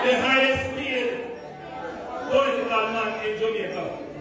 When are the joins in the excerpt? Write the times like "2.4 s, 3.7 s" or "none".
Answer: none